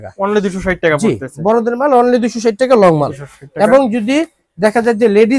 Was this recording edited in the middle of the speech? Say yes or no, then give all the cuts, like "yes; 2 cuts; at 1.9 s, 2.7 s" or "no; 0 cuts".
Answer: no; 0 cuts